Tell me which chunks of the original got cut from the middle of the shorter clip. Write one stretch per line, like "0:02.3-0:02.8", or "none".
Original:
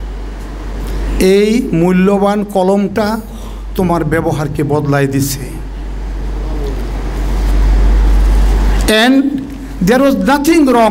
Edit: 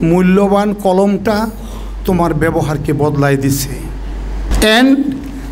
0:06.2-0:08.7